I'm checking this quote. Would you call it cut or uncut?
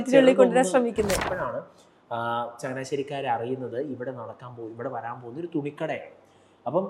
cut